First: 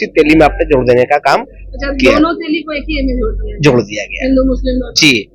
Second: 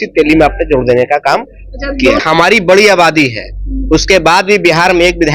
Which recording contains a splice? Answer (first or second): second